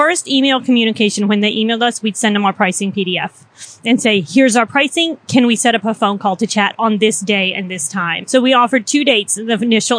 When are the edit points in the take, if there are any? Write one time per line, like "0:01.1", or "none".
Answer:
0:08.2